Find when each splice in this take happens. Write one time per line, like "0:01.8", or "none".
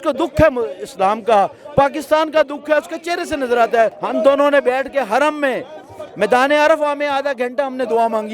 0:04.0